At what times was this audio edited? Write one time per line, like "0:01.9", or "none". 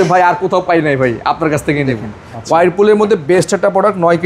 0:02.0